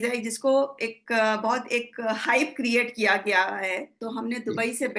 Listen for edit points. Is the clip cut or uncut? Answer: cut